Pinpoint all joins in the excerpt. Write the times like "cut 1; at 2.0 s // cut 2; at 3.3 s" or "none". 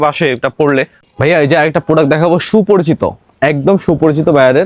cut 1; at 1.0 s